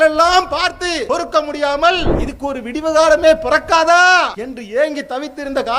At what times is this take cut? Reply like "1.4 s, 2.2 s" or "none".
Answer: 1.0 s, 2.2 s, 4.5 s